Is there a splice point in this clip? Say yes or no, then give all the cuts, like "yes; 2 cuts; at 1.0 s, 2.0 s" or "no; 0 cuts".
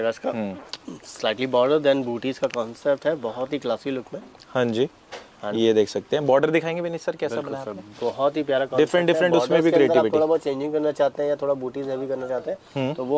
no; 0 cuts